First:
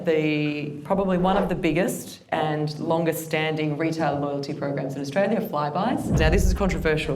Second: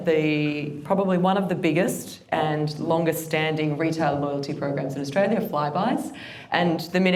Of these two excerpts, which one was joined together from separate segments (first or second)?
first